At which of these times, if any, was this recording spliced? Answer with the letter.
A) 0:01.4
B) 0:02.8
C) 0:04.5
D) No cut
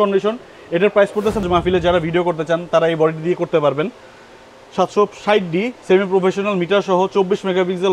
A